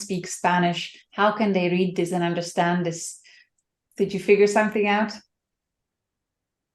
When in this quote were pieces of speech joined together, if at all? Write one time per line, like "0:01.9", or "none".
none